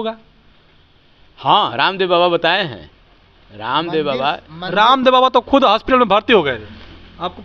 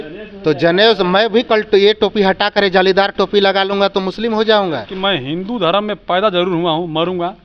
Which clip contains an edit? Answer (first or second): second